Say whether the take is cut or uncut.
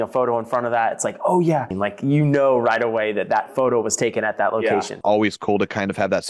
cut